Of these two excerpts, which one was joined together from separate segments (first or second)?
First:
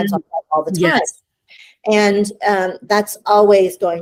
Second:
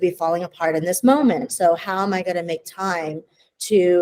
second